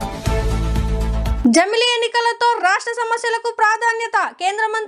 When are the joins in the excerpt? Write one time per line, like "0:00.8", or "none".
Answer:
0:01.3